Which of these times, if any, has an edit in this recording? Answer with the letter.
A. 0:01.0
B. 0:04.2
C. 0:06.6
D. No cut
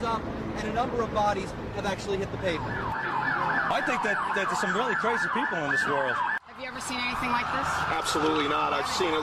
C